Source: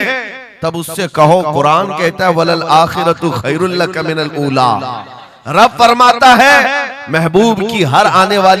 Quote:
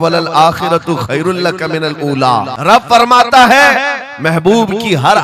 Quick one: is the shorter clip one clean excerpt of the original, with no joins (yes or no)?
no